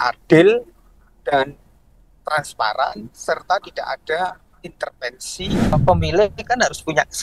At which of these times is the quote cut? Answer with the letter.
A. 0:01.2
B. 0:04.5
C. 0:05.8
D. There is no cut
C